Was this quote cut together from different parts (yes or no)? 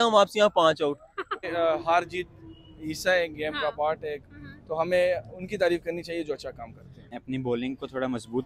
yes